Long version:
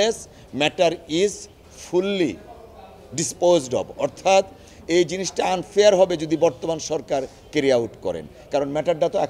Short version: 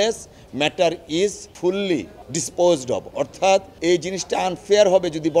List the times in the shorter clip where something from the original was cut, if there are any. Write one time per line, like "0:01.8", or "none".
0:01.5
0:02.2
0:03.7